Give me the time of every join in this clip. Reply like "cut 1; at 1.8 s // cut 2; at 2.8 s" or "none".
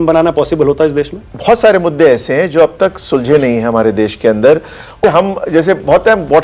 cut 1; at 1.2 s // cut 2; at 5.0 s